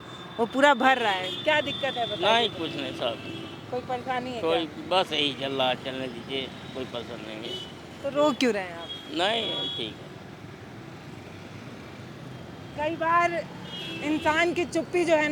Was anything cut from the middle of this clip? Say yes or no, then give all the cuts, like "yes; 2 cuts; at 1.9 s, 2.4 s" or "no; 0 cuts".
no; 0 cuts